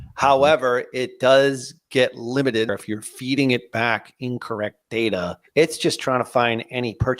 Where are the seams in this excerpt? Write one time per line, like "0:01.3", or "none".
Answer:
0:02.7
0:05.4